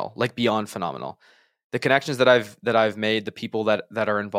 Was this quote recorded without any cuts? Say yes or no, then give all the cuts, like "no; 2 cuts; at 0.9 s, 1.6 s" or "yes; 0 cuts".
yes; 0 cuts